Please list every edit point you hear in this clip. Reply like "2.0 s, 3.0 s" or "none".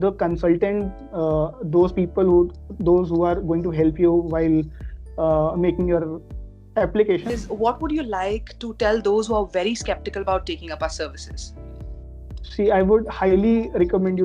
7.3 s